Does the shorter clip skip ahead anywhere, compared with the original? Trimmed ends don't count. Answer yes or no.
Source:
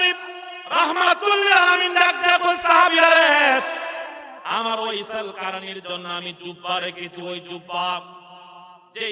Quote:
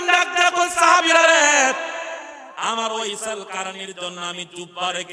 no